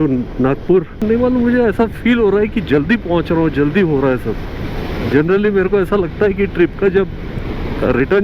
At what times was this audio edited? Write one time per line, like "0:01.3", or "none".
0:01.0